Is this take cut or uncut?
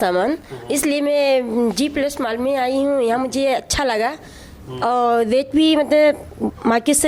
uncut